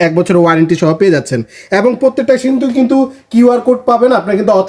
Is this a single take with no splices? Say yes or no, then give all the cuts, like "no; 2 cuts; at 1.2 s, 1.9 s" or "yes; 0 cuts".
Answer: yes; 0 cuts